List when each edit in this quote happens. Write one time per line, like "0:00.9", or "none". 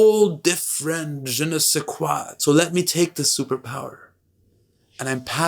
0:02.3